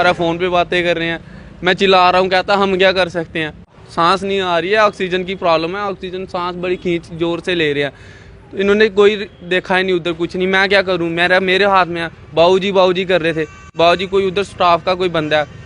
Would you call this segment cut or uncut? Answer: cut